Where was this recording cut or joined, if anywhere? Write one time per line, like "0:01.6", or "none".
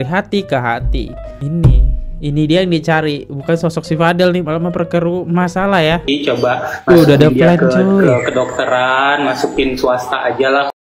0:06.1